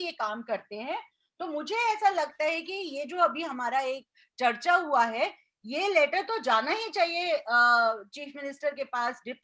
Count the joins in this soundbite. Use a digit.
0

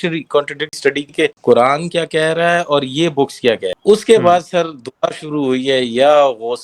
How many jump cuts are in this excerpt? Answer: 2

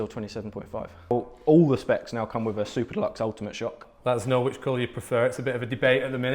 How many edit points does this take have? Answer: 2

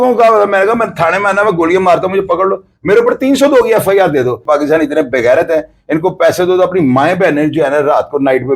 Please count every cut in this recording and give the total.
1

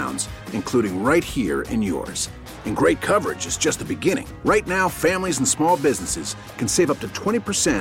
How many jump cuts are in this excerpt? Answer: 0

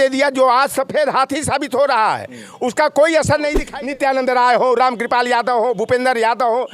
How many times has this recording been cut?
1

